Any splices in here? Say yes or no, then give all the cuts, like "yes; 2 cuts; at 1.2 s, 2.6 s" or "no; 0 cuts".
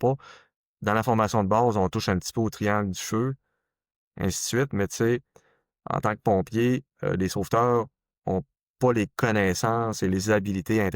no; 0 cuts